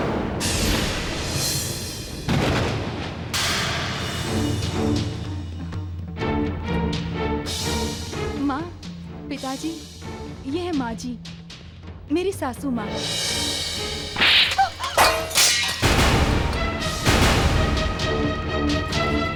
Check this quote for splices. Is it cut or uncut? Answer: uncut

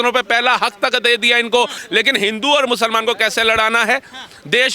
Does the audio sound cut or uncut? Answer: cut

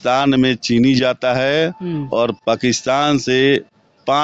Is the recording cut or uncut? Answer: uncut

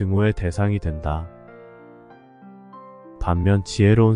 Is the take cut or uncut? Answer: uncut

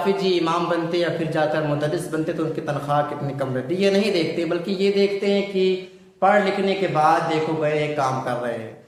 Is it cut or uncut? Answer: uncut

